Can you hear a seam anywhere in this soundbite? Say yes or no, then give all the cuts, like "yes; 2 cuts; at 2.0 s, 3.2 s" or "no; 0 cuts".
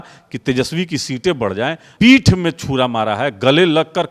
yes; 1 cut; at 1.9 s